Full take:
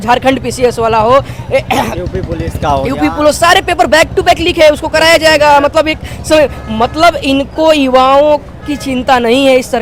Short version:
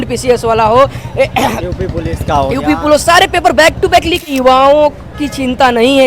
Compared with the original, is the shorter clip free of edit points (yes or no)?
no